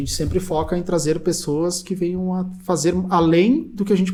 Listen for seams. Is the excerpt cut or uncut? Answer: uncut